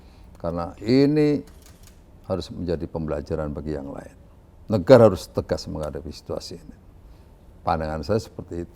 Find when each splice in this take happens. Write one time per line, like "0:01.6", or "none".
none